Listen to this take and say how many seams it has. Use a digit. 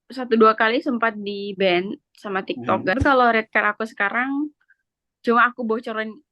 1